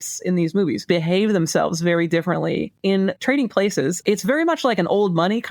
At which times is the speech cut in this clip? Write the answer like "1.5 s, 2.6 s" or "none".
0.8 s, 2.9 s, 4.0 s